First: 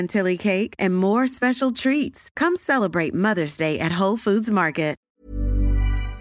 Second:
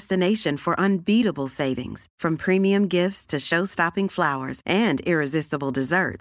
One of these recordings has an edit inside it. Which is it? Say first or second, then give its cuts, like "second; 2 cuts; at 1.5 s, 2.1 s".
first; 1 cut; at 5.0 s